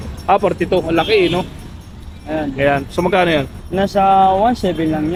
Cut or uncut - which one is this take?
uncut